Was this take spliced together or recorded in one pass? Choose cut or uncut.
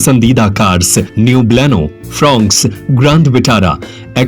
cut